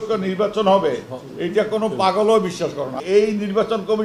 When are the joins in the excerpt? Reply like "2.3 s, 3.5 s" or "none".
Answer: 2.9 s

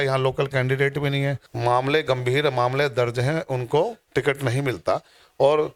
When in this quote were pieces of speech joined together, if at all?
1.5 s

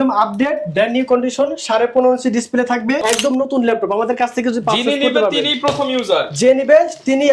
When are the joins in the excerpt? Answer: 3.0 s

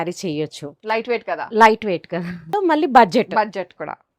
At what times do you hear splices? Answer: 2.5 s

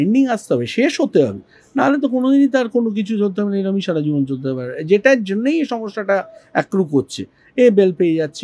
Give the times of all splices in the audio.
none

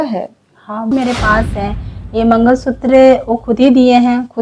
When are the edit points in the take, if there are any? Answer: 0.9 s

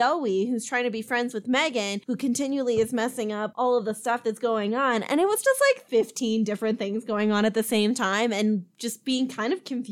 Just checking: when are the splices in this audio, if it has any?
5.8 s

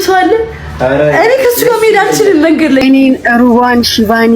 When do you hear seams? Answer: 2.8 s

